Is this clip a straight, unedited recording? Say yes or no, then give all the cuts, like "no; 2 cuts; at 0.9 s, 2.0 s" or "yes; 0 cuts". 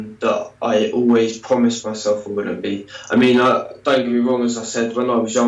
yes; 0 cuts